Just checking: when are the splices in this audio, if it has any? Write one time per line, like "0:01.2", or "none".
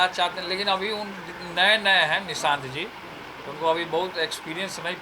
none